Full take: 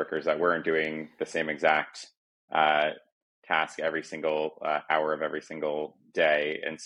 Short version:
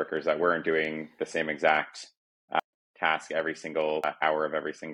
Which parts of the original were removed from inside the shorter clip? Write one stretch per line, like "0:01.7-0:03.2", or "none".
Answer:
0:02.6-0:03.1
0:04.5-0:04.7